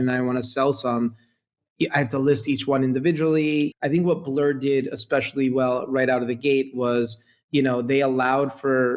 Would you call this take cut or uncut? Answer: cut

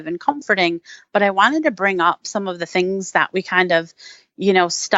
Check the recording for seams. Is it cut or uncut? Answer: uncut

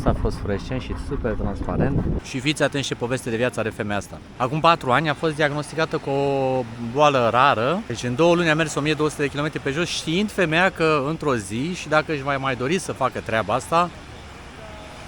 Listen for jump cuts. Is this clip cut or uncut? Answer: cut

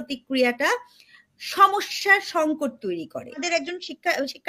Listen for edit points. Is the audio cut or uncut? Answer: cut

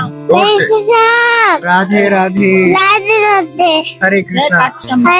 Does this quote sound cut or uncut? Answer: uncut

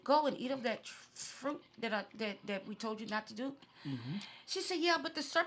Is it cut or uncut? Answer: uncut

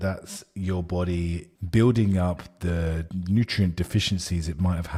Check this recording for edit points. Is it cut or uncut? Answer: uncut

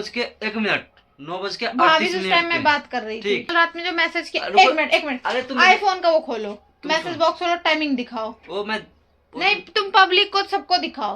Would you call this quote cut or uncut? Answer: cut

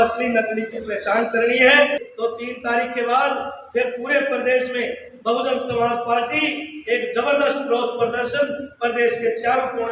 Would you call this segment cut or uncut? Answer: cut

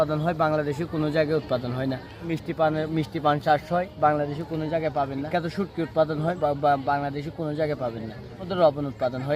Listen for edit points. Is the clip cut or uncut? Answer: cut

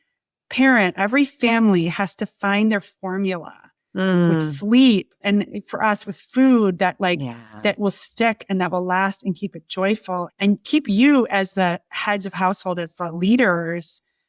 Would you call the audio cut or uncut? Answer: uncut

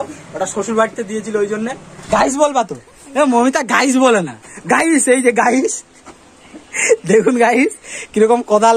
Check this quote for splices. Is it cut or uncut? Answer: cut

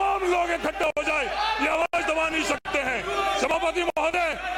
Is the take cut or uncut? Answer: uncut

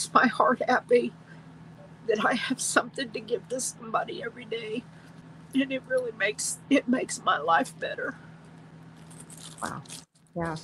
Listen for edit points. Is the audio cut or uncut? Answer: uncut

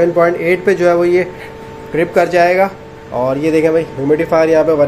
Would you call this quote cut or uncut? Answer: uncut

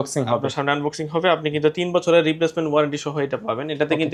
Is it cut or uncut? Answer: uncut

